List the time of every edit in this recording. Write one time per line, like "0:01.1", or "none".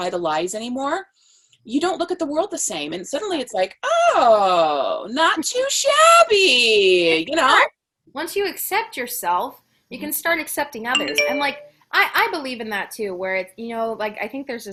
none